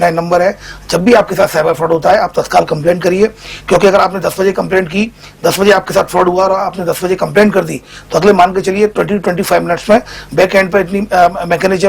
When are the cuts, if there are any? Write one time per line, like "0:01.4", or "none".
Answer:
none